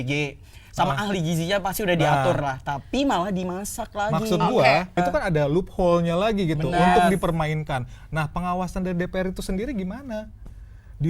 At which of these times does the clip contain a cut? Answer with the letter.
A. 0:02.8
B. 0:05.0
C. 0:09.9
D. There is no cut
B